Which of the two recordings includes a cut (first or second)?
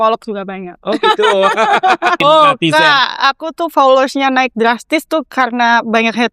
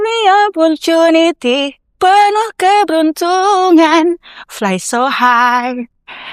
first